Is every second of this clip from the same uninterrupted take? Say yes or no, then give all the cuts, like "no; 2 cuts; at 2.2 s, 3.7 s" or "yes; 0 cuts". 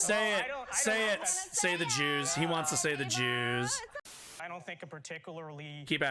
no; 1 cut; at 4.2 s